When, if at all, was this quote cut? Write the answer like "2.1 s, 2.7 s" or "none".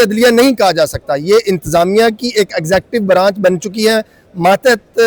none